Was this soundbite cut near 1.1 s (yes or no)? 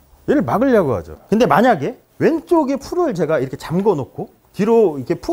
yes